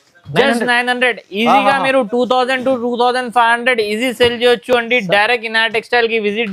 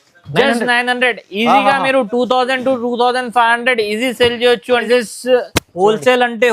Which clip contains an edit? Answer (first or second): second